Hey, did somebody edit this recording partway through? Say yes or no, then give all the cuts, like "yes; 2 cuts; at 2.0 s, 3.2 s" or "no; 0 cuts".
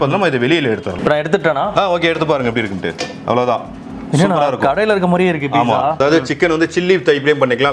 yes; 2 cuts; at 1.0 s, 6.0 s